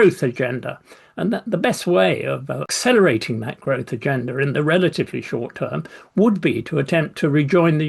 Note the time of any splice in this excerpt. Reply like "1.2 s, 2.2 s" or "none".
2.7 s